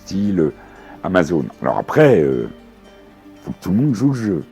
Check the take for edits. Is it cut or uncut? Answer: uncut